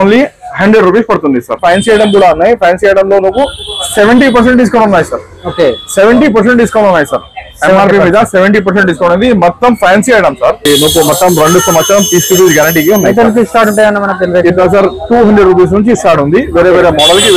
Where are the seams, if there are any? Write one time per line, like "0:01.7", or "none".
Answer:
0:01.6
0:10.7